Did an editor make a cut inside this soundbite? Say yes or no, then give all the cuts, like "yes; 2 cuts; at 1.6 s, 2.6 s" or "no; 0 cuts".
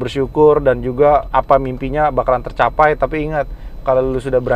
yes; 1 cut; at 1.3 s